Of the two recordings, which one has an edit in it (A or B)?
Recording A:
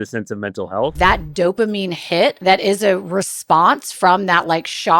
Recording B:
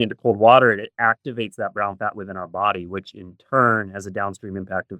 A